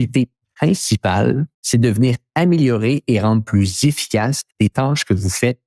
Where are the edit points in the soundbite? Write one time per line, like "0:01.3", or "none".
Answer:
0:01.5